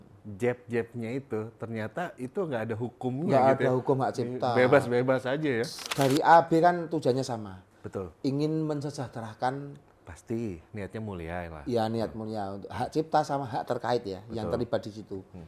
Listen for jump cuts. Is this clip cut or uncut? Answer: cut